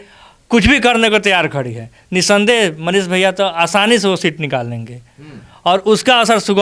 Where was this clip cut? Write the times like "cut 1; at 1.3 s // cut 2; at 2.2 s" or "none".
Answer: none